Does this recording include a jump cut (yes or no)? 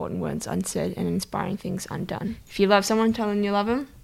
yes